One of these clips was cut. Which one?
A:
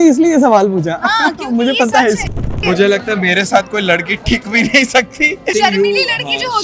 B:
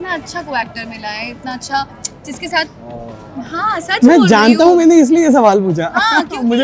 A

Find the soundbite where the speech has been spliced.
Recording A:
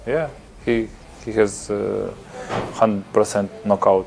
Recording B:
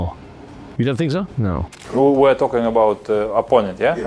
B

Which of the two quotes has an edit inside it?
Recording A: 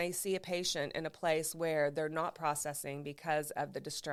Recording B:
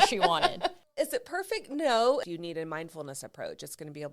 B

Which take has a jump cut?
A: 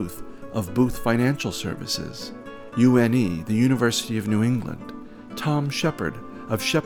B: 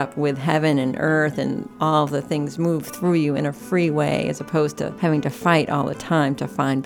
B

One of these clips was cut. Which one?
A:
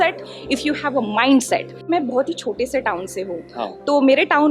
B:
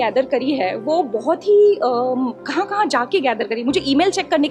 A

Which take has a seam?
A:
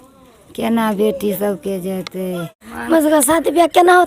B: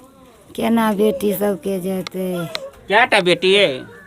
A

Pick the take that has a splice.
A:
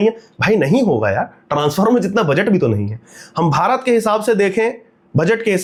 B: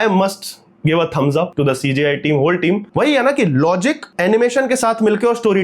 B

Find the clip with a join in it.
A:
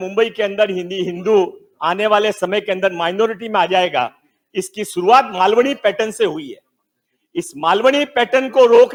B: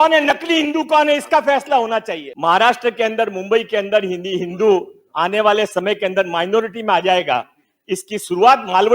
B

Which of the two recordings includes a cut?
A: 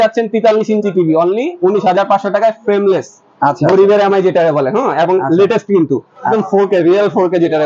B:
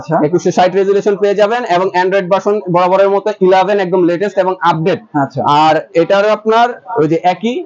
A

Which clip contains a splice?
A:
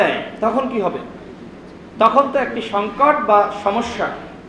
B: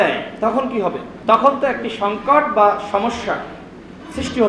B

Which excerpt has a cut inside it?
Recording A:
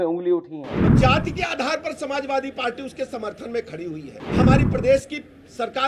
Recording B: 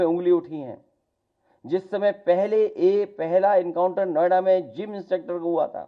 A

